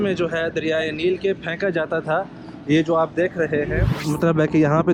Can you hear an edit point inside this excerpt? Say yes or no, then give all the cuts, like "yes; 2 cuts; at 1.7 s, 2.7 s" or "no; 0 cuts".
yes; 1 cut; at 3.9 s